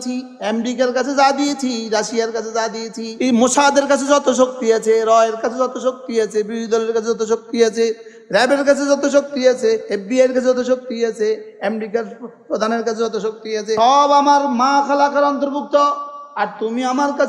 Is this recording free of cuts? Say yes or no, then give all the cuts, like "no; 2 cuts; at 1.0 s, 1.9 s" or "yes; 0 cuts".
no; 3 cuts; at 3.0 s, 9.8 s, 13.8 s